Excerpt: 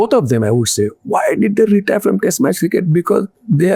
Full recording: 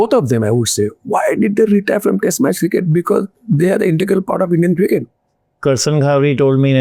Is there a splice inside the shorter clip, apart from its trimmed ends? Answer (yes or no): no